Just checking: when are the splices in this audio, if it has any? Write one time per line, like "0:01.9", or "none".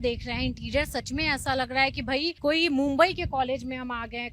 0:02.4